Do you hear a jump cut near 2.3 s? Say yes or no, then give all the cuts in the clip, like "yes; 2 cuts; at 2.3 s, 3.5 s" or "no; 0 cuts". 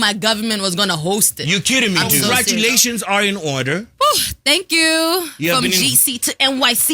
yes; 1 cut; at 2.3 s